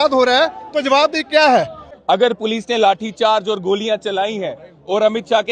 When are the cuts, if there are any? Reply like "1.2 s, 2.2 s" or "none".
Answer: 1.8 s